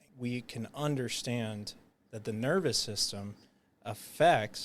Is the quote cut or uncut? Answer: uncut